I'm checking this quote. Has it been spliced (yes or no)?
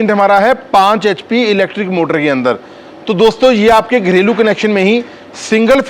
no